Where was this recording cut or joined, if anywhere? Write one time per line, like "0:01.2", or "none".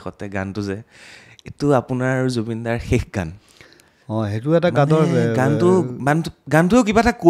none